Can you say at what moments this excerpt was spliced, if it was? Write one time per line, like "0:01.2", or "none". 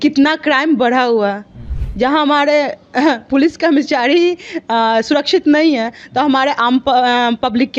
none